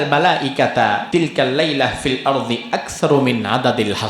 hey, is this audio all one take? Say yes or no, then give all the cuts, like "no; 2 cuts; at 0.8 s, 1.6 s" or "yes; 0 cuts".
no; 1 cut; at 1.0 s